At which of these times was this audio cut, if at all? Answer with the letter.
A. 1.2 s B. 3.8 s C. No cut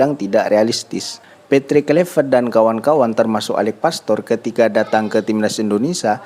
A